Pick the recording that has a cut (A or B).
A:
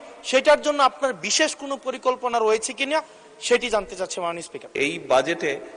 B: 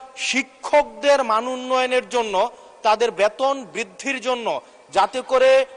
A